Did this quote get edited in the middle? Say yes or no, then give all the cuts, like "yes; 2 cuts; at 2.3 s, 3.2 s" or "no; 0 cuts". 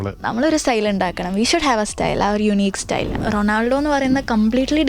yes; 1 cut; at 3.2 s